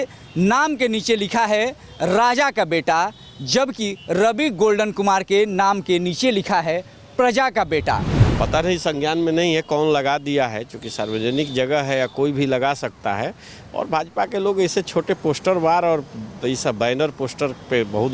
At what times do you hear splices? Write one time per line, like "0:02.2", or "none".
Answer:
0:08.2